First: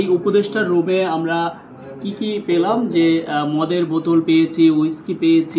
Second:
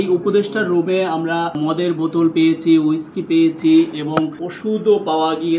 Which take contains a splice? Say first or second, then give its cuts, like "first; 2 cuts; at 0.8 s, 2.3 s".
second; 2 cuts; at 1.6 s, 4.4 s